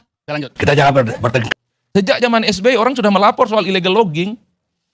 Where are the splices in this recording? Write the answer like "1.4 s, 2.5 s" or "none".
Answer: 1.4 s

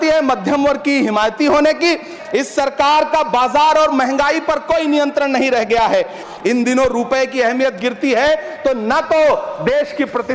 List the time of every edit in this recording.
2.2 s, 6.2 s

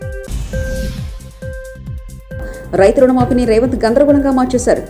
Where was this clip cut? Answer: 2.4 s

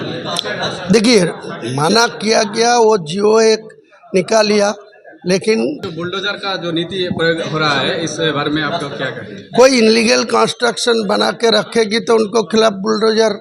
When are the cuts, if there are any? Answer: 5.8 s

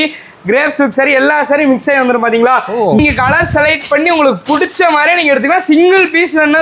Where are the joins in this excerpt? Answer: 3.0 s

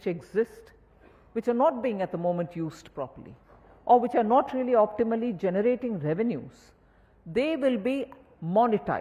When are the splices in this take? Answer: none

